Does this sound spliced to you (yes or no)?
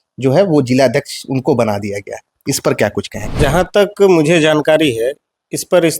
yes